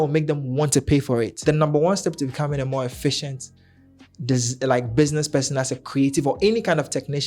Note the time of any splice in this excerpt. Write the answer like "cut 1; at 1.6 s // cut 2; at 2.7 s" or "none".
cut 1; at 1.3 s